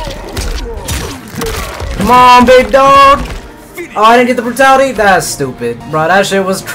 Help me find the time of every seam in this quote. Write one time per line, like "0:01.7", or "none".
0:05.8